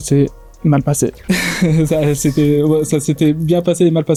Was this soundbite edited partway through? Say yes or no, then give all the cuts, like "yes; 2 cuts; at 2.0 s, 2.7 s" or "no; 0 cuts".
no; 0 cuts